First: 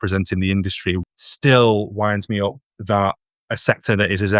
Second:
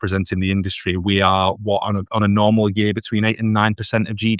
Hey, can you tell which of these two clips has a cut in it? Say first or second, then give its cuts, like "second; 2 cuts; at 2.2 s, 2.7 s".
first; 1 cut; at 1.0 s